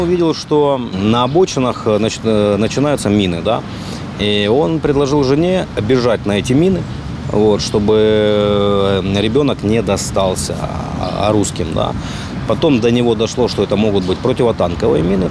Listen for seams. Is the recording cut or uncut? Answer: cut